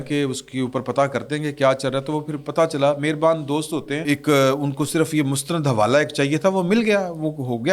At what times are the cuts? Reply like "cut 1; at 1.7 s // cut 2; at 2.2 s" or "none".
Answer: cut 1; at 4.0 s

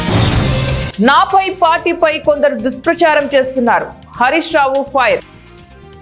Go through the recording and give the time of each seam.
none

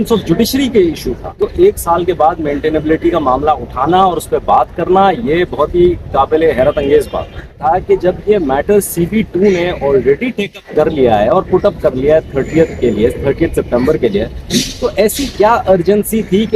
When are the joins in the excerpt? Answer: cut 1; at 1.4 s // cut 2; at 7.6 s

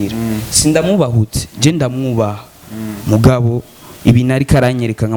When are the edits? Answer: none

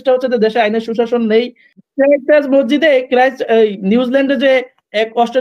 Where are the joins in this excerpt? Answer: cut 1; at 1.9 s

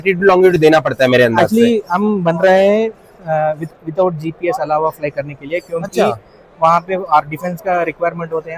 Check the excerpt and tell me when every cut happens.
none

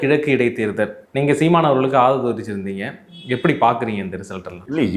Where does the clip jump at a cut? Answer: none

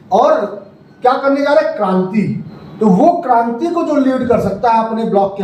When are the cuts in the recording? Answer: none

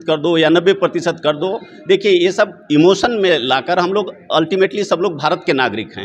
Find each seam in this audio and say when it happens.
cut 1; at 4.7 s

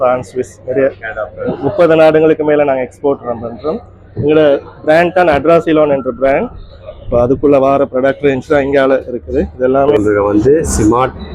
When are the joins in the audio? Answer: cut 1; at 9.9 s

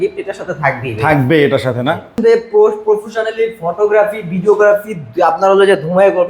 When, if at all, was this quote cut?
cut 1; at 2.2 s

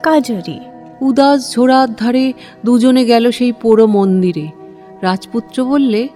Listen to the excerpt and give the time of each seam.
none

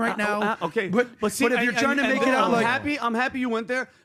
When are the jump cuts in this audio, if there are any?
none

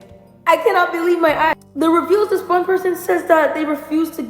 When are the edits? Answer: cut 1; at 1.5 s

